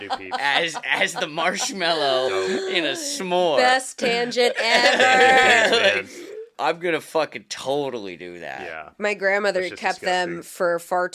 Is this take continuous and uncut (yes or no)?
no